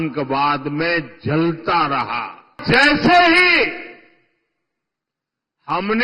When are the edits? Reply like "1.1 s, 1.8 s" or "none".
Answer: 2.6 s